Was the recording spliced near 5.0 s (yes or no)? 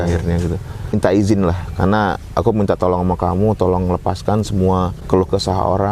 yes